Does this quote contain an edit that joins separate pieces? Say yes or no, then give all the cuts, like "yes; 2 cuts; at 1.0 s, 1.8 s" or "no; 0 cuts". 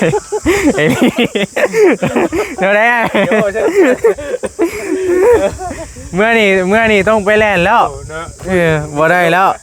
no; 0 cuts